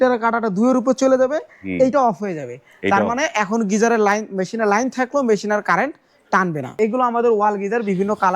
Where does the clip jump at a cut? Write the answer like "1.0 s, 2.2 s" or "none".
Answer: 6.7 s